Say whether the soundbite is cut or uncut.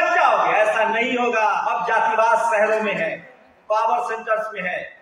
cut